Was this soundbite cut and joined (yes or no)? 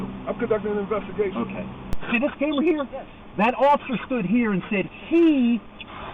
yes